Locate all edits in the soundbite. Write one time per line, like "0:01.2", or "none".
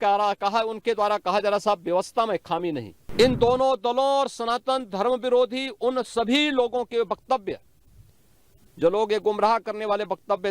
0:03.0

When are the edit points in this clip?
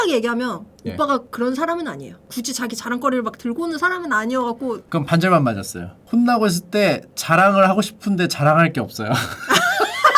0:02.2
0:04.8

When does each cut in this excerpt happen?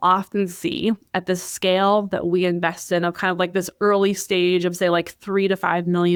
none

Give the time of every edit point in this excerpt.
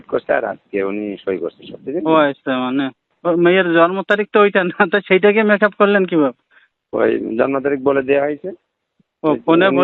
0:03.0

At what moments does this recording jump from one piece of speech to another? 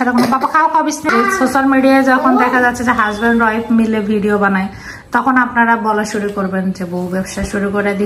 0:01.1

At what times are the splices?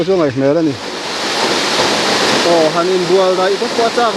0:01.1

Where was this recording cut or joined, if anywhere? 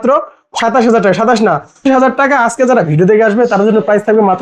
0:01.8

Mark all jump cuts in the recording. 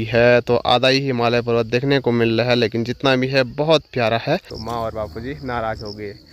0:04.6

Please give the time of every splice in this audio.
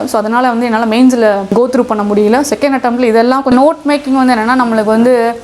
0:01.5
0:03.5

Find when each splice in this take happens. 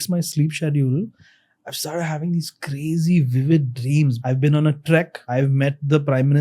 0:04.2
0:05.2

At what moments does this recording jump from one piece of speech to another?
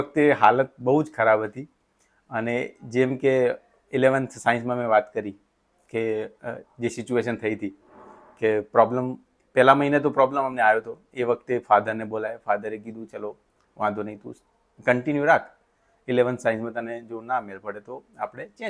none

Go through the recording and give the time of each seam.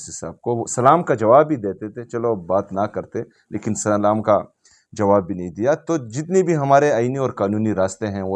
none

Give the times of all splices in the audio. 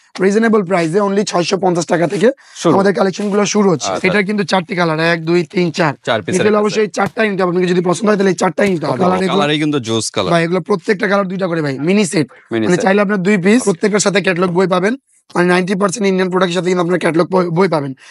0:03.9
0:08.9
0:13.6

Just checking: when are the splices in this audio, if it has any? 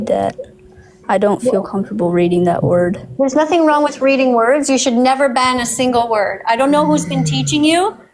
0:03.0

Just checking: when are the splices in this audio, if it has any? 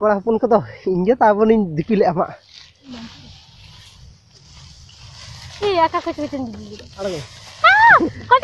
0:02.9

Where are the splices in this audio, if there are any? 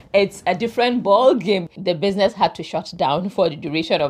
0:01.7

